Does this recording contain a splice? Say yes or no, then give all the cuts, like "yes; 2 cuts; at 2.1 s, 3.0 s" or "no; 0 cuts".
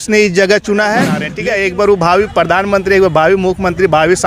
yes; 1 cut; at 1.2 s